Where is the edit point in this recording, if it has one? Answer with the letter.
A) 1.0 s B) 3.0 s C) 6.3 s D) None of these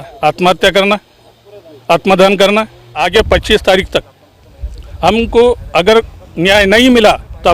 B